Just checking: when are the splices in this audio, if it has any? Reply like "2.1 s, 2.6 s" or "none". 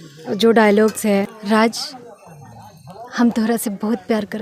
1.3 s

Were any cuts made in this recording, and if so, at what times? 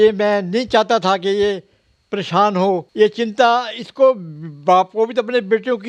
2.9 s

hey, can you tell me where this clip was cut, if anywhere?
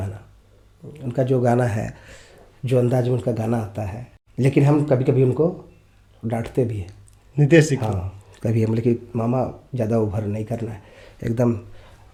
none

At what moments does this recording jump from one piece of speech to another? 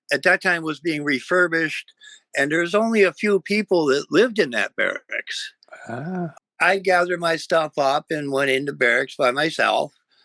6.3 s

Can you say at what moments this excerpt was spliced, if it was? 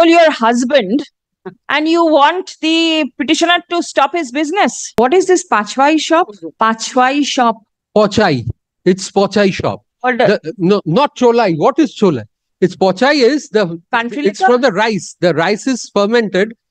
5.0 s, 6.4 s

